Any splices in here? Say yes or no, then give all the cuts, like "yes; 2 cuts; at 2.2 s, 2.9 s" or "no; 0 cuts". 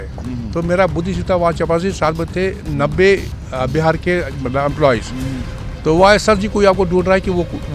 no; 0 cuts